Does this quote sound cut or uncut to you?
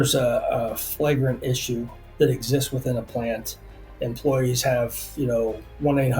cut